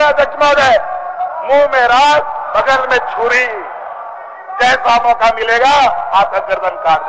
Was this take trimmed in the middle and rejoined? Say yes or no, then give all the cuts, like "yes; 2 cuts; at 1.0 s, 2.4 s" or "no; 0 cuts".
no; 0 cuts